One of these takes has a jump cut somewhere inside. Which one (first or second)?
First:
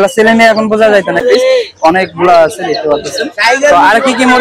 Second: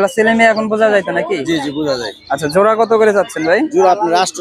first